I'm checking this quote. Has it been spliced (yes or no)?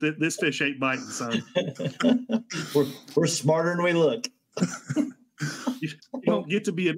no